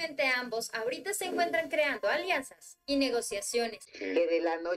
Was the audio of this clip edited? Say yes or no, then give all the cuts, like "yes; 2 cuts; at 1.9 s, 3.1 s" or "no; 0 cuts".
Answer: yes; 1 cut; at 3.9 s